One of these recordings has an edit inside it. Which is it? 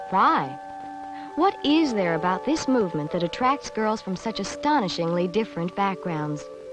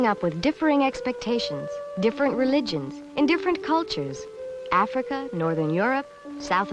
first; 1 cut; at 1.8 s

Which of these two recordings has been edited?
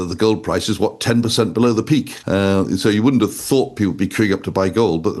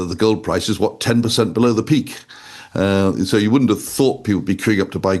first; 1 cut; at 2.2 s

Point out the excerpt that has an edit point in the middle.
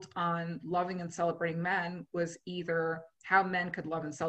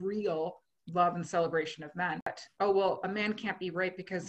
second; 1 cut; at 2.4 s

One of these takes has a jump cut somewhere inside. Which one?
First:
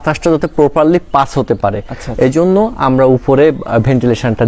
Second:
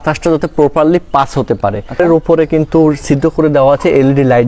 second; 1 cut; at 2.0 s

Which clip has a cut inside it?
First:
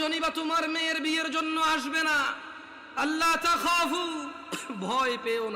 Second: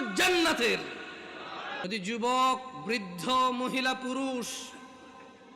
second; 1 cut; at 1.9 s

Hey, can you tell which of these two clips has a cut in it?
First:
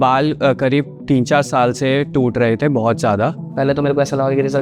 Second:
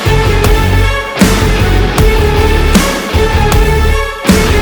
first; 1 cut; at 3.4 s

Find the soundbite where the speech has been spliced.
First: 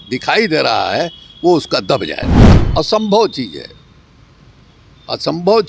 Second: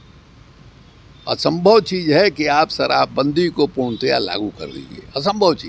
first; 1 cut; at 2.6 s

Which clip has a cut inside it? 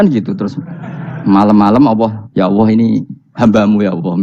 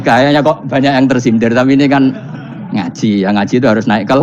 first; 1 cut; at 2.2 s

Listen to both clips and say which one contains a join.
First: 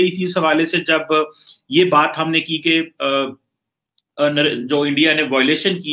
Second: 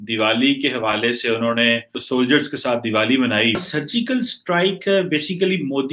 second; 2 cuts; at 2.0 s, 3.6 s

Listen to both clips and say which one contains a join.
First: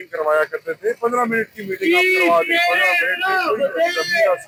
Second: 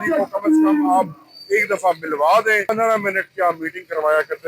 second; 1 cut; at 2.7 s

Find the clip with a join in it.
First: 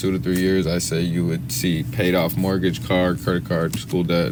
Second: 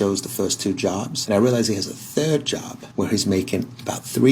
second; 2 cuts; at 1.1 s, 2.8 s

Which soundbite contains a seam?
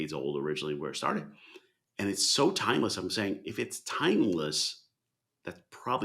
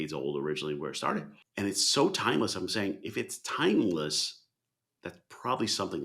second; 1 cut; at 1.4 s

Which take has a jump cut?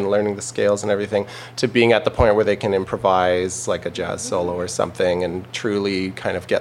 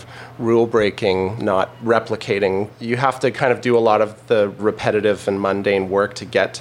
second; 3 cuts; at 1.5 s, 2.8 s, 4.6 s

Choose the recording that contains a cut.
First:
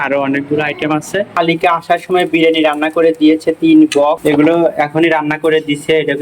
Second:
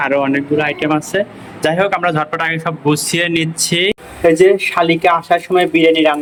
first; 2 cuts; at 1.3 s, 4.2 s

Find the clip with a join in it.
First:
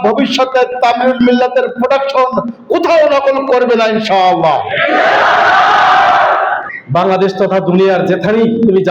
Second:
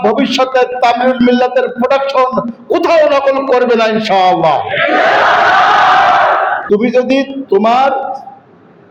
first; 1 cut; at 6.6 s

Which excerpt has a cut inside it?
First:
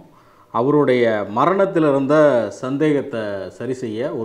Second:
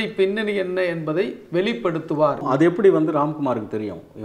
second; 1 cut; at 2.4 s

